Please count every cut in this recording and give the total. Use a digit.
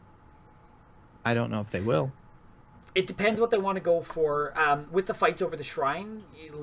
1